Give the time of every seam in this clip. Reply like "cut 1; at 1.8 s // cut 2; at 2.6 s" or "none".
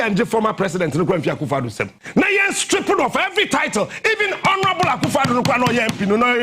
cut 1; at 1.9 s